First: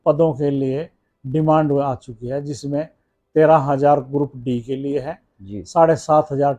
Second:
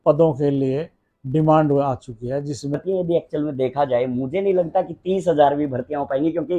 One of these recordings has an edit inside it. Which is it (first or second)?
second